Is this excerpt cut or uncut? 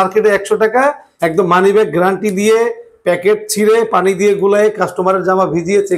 cut